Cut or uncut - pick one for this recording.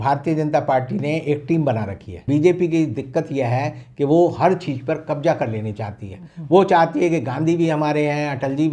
cut